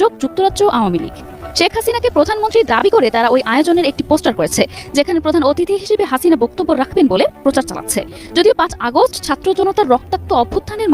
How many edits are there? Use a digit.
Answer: 0